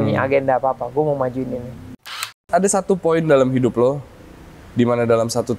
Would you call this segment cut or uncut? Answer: cut